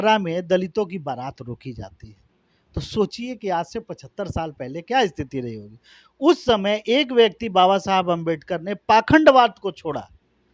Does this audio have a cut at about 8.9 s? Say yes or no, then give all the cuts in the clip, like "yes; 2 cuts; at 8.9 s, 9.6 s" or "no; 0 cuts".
no; 0 cuts